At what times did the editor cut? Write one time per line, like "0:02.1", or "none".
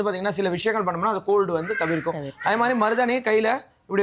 none